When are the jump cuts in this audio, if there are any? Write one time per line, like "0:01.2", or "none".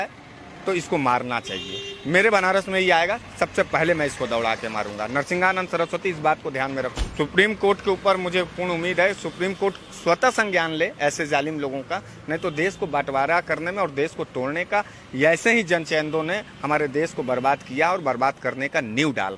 none